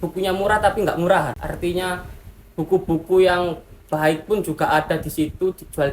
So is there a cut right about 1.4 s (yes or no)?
yes